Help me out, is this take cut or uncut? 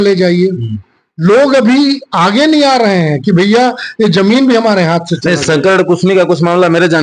uncut